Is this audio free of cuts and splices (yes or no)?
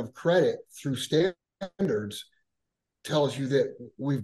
yes